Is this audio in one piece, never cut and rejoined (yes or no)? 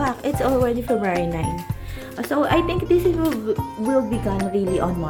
yes